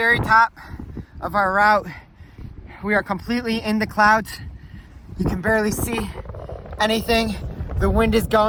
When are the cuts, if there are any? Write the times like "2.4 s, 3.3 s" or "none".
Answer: none